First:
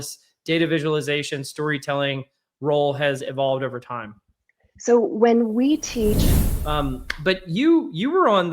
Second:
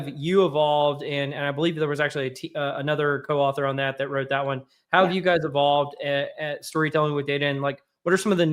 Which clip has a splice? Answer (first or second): first